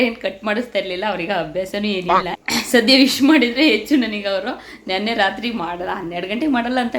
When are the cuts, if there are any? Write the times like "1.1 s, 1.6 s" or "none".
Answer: 2.4 s